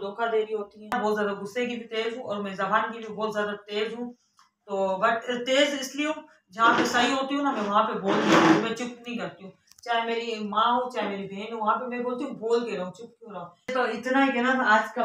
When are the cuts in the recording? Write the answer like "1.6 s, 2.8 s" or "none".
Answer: 0.9 s, 13.6 s